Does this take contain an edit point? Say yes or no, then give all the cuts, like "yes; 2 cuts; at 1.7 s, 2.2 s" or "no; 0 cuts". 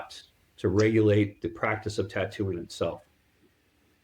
no; 0 cuts